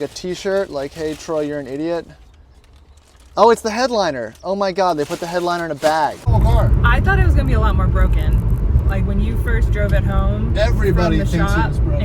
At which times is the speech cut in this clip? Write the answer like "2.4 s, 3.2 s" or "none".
6.2 s